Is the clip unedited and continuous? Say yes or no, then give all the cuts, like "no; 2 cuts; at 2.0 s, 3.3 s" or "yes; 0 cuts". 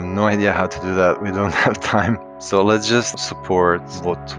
no; 2 cuts; at 2.3 s, 3.2 s